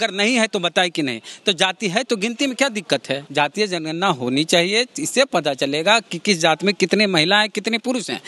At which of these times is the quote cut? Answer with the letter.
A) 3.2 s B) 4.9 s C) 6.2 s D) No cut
A